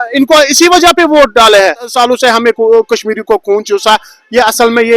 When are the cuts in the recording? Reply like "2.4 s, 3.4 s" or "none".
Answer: 1.9 s